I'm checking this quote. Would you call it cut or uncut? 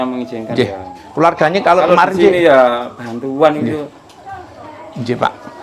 uncut